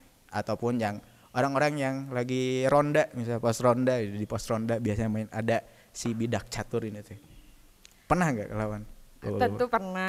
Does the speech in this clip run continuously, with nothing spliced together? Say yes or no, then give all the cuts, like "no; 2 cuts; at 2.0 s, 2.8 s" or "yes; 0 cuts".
yes; 0 cuts